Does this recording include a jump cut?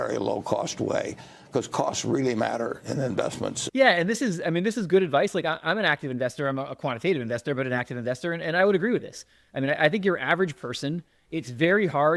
no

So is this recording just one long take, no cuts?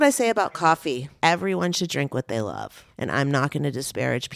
no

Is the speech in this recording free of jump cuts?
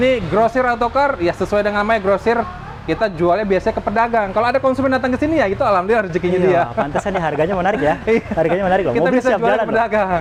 yes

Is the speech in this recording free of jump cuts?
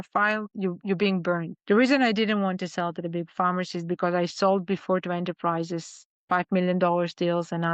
no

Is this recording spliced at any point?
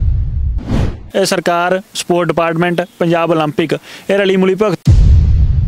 yes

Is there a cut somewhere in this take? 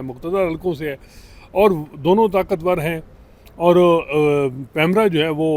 no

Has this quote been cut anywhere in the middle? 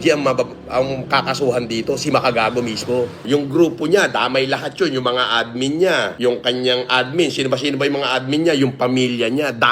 yes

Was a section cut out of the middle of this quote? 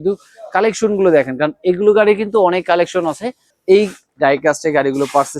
yes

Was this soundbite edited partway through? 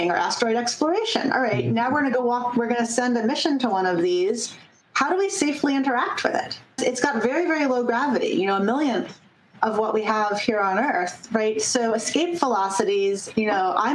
yes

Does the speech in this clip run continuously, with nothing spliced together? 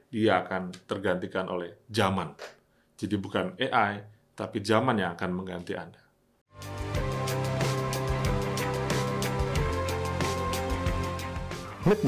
yes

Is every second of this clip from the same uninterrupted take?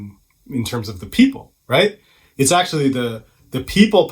yes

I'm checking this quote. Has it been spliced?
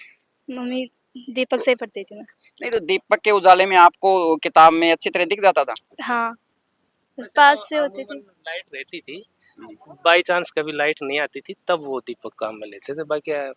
no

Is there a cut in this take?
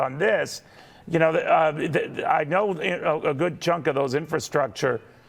yes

